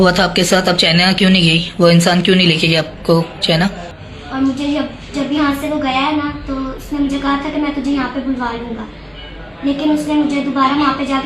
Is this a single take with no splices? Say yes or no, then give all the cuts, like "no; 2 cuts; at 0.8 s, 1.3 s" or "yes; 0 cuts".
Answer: no; 1 cut; at 3.9 s